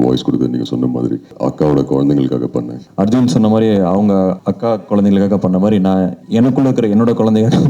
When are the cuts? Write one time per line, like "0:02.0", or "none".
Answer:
0:01.3
0:02.8
0:04.5
0:06.2